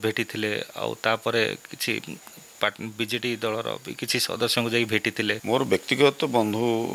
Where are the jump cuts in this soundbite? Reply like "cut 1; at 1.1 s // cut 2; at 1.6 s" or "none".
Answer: cut 1; at 5.4 s